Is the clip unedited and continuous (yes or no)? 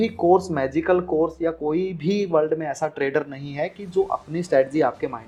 yes